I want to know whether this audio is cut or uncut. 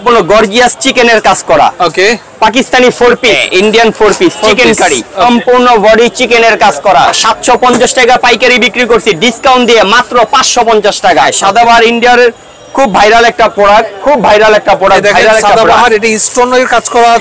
cut